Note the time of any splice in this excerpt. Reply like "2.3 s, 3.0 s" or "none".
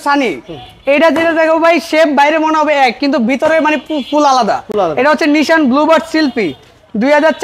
none